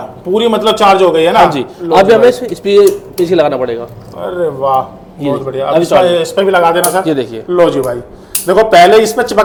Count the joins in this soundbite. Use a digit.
0